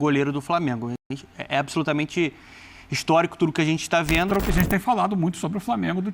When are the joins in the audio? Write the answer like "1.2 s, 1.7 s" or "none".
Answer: 4.3 s